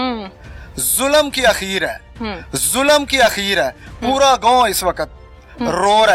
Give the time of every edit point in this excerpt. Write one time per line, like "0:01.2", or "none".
none